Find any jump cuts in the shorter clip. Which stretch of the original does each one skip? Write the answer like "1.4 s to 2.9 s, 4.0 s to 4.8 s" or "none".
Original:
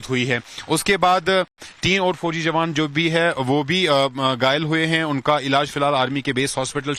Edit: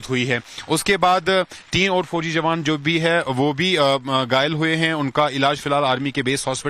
1.6 s to 1.7 s